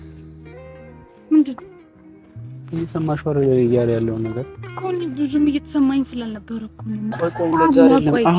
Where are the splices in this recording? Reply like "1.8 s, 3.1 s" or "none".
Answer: 7.1 s